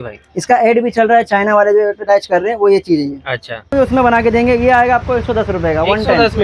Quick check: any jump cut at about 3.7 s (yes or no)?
yes